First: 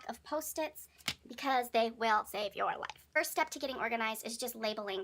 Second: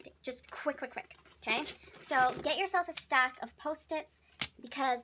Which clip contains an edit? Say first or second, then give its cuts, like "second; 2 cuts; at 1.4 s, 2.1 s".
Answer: first; 1 cut; at 3.0 s